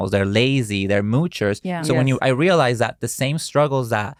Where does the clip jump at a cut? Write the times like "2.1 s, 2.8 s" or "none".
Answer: none